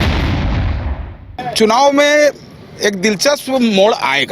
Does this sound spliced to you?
no; 0 cuts

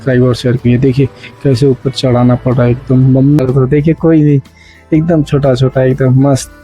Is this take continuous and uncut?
no; 1 cut; at 3.4 s

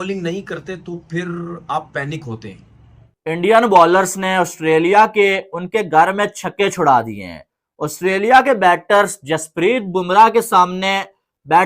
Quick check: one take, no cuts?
no; 1 cut; at 3.2 s

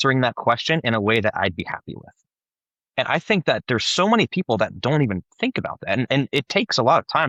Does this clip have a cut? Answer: no; 0 cuts

